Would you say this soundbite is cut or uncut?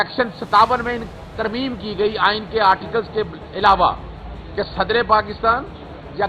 uncut